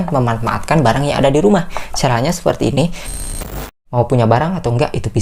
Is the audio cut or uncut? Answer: cut